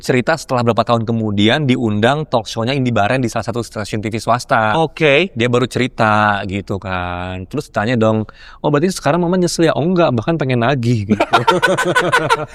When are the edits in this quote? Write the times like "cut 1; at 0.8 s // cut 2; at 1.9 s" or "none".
none